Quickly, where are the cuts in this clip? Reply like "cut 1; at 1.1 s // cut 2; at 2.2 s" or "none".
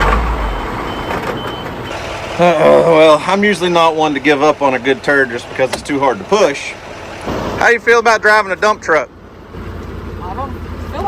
cut 1; at 1.9 s // cut 2; at 7.3 s // cut 3; at 9.5 s

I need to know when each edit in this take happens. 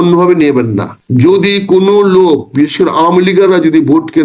cut 1; at 0.9 s

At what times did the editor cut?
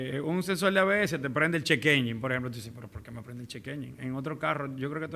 none

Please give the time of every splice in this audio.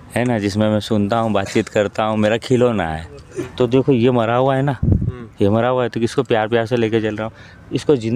cut 1; at 3.5 s

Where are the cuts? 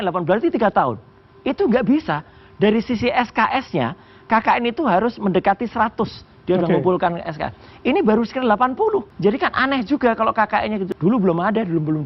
cut 1; at 9.1 s // cut 2; at 10.9 s

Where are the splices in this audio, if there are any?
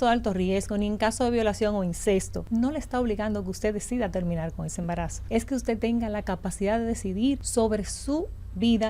cut 1; at 2.4 s // cut 2; at 5.2 s // cut 3; at 7.4 s

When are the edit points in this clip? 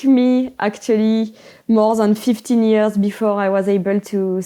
none

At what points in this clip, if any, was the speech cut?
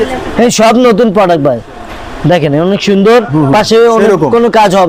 none

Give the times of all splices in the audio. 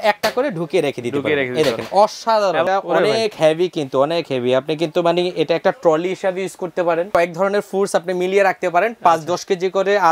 cut 1; at 2.7 s // cut 2; at 7.1 s

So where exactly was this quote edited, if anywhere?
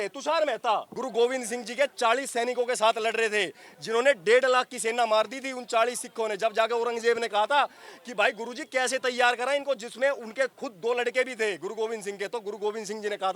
cut 1; at 0.9 s

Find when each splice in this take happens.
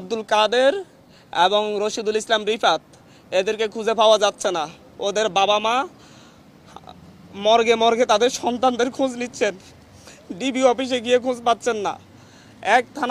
none

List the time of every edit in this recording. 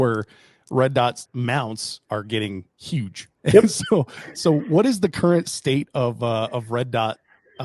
cut 1; at 1.2 s // cut 2; at 3.2 s

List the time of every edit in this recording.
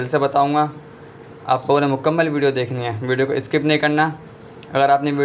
none

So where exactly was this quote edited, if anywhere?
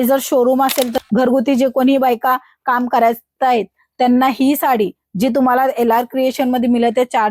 cut 1; at 1.0 s

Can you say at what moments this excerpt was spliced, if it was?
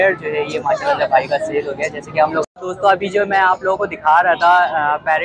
cut 1; at 2.6 s

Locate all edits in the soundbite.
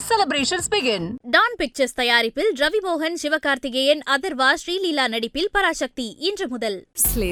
none

